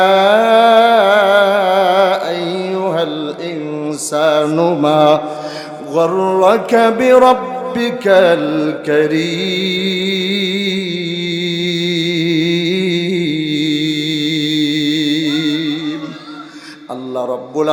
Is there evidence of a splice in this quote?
no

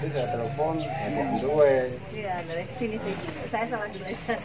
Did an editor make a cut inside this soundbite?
no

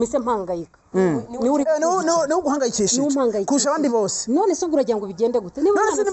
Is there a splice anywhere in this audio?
no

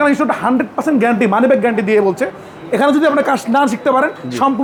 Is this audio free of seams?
yes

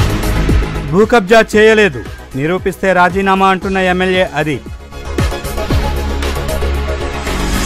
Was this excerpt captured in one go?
yes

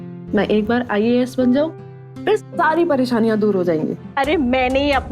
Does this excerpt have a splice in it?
yes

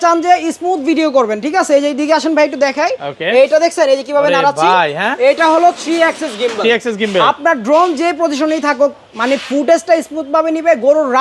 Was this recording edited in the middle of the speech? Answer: no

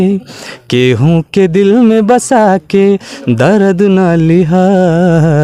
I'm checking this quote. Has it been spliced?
no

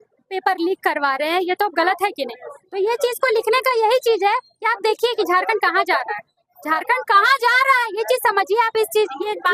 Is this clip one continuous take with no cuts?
yes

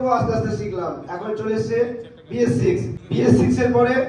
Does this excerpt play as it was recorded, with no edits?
no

